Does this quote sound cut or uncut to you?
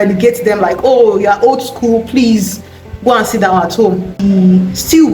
cut